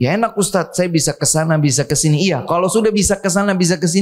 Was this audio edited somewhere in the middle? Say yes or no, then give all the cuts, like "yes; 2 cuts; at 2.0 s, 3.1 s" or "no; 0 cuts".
no; 0 cuts